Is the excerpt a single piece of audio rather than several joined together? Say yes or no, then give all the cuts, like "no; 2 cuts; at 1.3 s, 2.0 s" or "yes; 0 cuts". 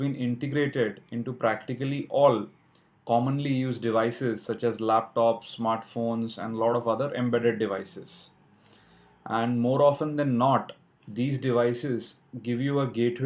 no; 1 cut; at 4.2 s